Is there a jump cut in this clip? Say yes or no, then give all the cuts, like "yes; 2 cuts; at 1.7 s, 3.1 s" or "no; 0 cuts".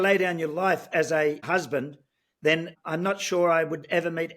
yes; 2 cuts; at 1.4 s, 2.8 s